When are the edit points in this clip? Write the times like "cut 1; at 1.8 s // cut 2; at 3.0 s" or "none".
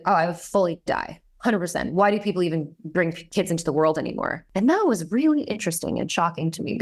cut 1; at 4.4 s

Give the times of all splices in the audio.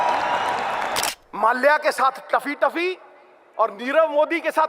cut 1; at 1.1 s

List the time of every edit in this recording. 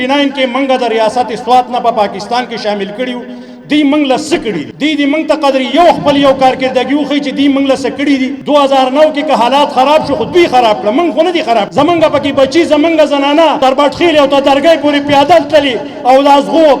cut 1; at 4.7 s // cut 2; at 8.4 s // cut 3; at 11.7 s // cut 4; at 13.6 s

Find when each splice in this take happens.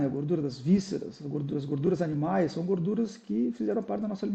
none

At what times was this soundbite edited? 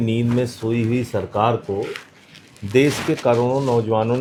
none

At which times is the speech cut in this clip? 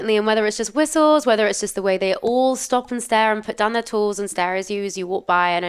none

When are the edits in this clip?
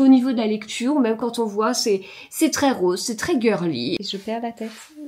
cut 1; at 4.0 s

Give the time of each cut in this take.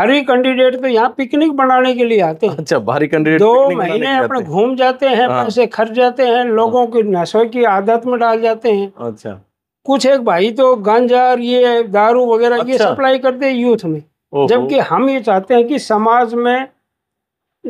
none

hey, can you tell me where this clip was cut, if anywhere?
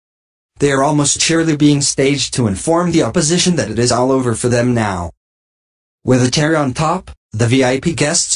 cut 1; at 3.1 s

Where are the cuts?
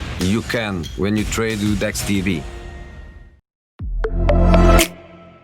cut 1; at 3.7 s

